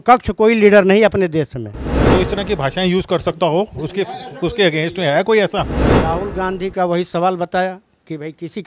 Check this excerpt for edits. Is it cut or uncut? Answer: cut